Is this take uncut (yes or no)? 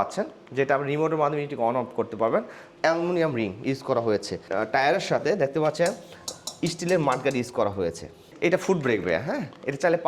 no